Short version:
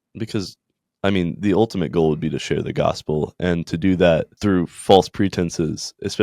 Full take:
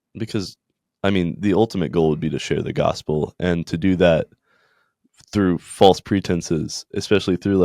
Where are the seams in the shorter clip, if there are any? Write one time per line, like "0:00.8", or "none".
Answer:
0:04.3